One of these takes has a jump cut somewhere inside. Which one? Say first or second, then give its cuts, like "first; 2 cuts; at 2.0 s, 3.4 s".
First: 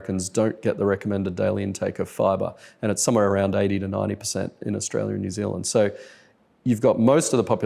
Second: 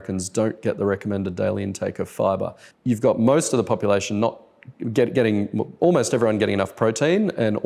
second; 1 cut; at 2.6 s